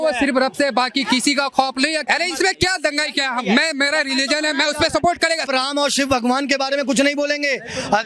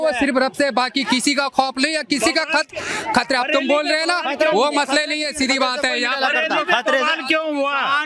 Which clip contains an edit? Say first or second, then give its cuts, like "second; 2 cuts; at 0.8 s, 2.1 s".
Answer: first; 2 cuts; at 2.0 s, 5.4 s